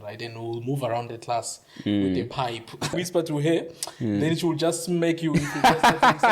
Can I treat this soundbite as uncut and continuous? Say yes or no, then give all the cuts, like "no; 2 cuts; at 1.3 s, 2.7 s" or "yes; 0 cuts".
no; 1 cut; at 2.9 s